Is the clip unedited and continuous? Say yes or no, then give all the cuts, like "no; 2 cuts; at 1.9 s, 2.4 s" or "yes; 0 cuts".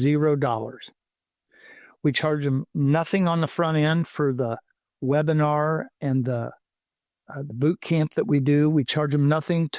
yes; 0 cuts